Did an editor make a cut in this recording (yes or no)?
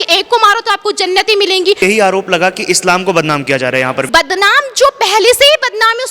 yes